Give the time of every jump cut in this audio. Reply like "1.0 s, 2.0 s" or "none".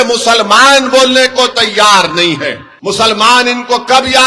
2.7 s